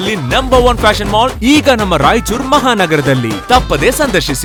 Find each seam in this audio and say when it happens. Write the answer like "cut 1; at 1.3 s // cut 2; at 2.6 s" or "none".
none